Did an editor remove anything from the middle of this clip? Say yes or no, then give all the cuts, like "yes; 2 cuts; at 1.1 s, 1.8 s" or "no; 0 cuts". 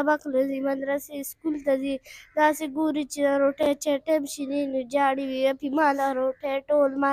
no; 0 cuts